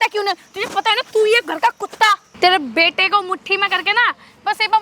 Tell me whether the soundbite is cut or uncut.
cut